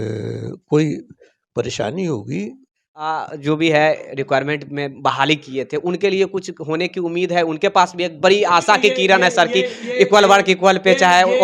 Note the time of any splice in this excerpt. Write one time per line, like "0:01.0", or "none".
0:03.2

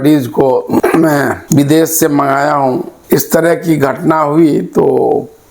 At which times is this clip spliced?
0:02.9

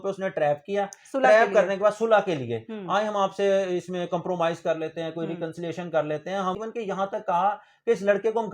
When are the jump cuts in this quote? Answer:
0:06.6

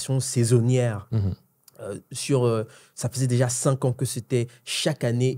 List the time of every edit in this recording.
none

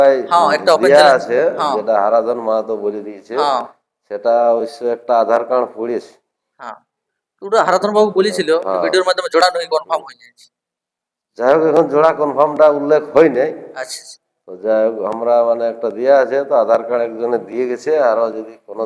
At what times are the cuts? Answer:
none

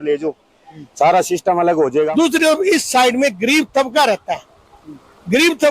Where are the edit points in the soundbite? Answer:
0:02.1

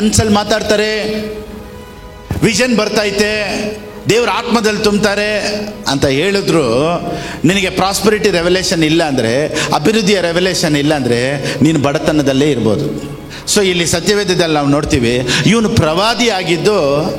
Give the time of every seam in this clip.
none

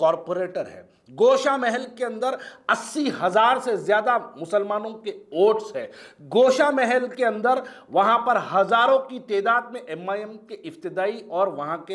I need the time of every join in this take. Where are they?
none

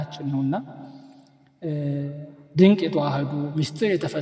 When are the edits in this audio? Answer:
none

